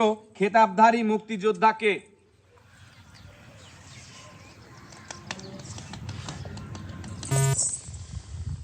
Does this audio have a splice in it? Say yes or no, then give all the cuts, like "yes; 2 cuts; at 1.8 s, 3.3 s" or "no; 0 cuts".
no; 0 cuts